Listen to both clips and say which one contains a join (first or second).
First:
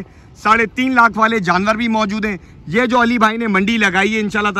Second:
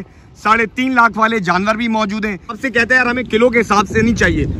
second